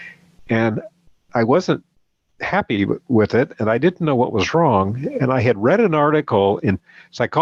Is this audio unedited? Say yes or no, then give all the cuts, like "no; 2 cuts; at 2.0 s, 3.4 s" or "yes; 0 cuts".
yes; 0 cuts